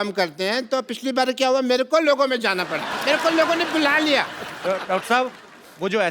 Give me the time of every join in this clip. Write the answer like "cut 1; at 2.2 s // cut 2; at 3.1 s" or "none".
cut 1; at 2.9 s